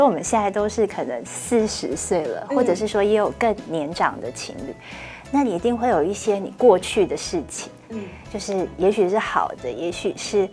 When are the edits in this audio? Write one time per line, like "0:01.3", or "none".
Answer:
none